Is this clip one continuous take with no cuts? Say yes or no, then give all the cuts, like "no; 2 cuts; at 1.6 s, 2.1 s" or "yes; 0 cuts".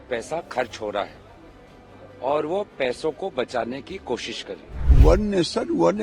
no; 1 cut; at 4.9 s